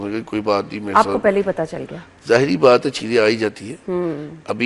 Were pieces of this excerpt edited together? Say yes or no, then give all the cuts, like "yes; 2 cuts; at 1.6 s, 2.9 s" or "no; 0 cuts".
no; 0 cuts